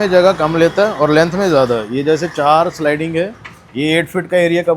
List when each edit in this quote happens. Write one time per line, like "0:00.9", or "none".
none